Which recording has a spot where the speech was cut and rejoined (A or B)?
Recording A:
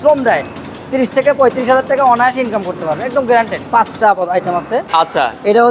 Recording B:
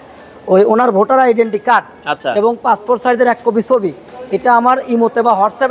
A